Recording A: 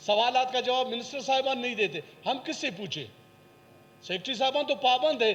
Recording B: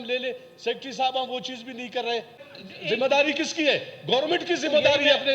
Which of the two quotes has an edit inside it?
B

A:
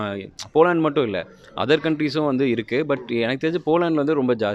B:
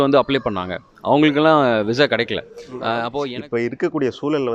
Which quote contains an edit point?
B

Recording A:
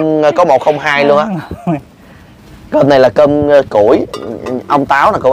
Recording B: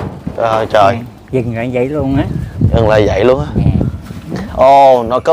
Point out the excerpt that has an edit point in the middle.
B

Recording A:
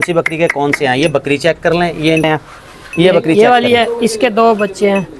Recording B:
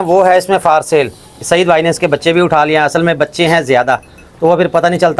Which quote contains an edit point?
A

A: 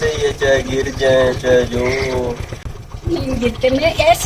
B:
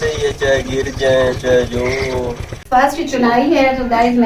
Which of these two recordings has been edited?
B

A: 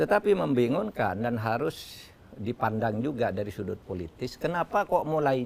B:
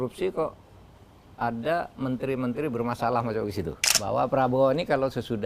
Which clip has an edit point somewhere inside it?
B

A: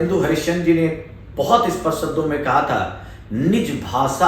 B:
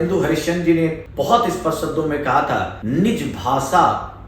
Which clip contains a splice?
B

